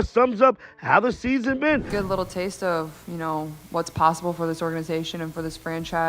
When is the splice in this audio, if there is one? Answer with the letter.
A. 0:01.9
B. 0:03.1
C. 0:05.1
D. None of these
A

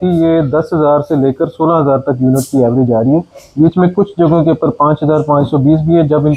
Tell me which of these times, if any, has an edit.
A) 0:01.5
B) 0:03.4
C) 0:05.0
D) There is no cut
D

